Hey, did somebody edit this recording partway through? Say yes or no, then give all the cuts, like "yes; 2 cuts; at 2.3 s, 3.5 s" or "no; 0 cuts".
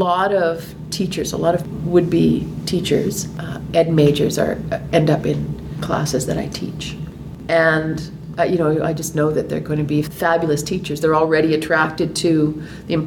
yes; 3 cuts; at 1.7 s, 7.2 s, 10.1 s